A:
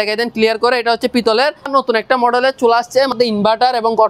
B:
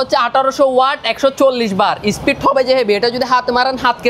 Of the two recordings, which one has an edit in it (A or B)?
A